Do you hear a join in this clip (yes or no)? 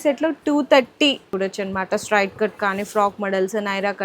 yes